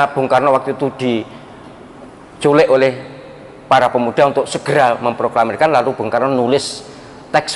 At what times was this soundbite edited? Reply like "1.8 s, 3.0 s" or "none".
none